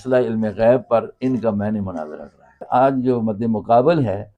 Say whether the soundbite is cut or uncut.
cut